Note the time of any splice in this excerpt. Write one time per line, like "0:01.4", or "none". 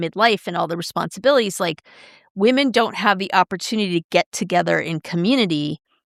none